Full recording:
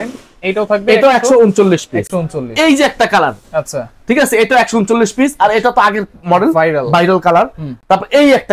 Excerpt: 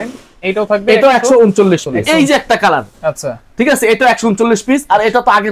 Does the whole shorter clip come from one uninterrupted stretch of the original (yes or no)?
no